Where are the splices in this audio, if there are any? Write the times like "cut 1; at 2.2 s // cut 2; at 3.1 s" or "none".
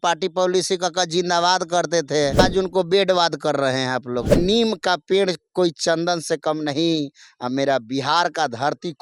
cut 1; at 2.4 s // cut 2; at 4.4 s